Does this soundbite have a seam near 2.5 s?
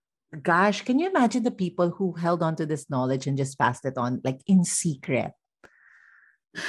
no; 0 cuts

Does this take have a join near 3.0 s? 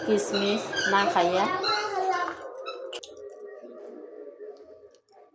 yes; 1 cut; at 3.0 s

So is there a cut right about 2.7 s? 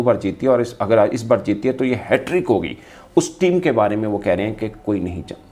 no; 1 cut; at 1.0 s

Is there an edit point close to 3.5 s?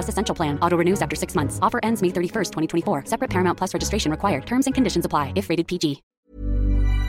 no; 1 cut; at 6.1 s

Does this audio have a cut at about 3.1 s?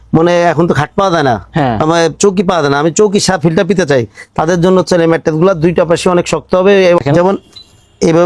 no; 1 cut; at 7.0 s

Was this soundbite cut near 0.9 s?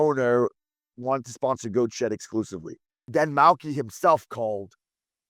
no; 1 cut; at 3.0 s

